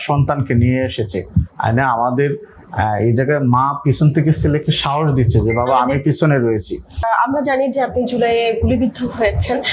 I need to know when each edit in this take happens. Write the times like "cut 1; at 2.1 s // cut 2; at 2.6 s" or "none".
cut 1; at 7.0 s